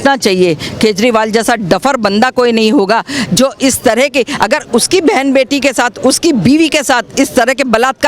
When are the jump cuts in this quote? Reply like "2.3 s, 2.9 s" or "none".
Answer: none